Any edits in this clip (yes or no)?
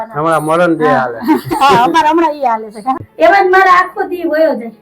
yes